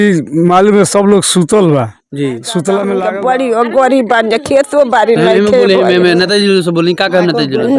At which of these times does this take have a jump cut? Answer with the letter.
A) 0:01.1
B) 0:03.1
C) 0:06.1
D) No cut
B